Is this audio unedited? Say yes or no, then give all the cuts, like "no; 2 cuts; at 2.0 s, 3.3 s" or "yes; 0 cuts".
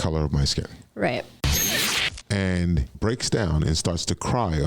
no; 2 cuts; at 1.7 s, 2.9 s